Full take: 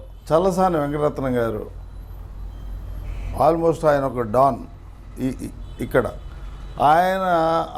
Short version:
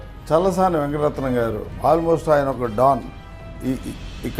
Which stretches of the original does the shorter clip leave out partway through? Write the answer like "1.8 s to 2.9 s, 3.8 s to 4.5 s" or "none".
1.7 s to 3.2 s